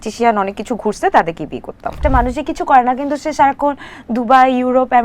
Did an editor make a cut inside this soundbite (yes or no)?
yes